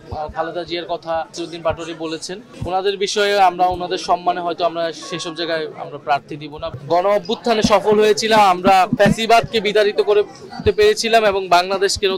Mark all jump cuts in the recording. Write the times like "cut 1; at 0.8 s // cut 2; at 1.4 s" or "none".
cut 1; at 6.8 s